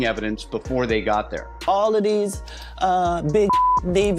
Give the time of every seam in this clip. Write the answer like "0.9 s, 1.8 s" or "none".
1.5 s